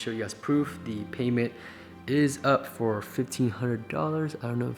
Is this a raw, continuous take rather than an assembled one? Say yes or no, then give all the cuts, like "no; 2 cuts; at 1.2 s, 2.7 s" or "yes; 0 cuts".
yes; 0 cuts